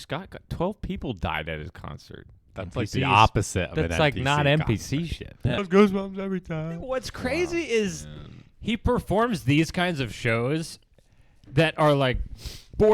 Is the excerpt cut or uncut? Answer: cut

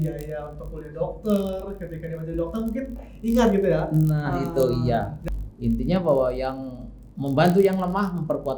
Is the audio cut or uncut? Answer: cut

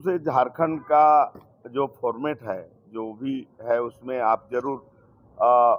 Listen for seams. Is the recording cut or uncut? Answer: uncut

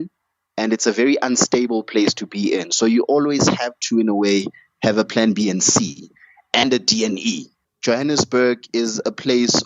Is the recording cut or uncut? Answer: cut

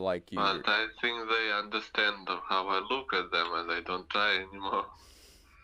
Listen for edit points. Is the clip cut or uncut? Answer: uncut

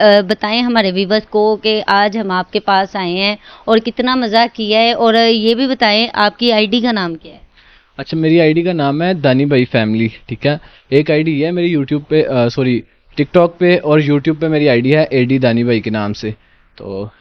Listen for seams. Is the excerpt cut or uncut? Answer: uncut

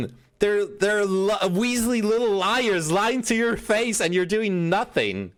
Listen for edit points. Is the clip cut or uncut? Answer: uncut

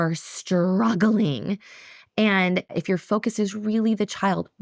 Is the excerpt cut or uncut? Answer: cut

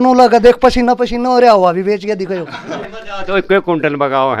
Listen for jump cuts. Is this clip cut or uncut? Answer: cut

